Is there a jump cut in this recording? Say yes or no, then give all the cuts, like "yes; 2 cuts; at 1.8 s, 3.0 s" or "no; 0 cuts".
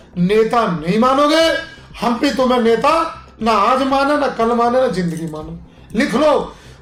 no; 0 cuts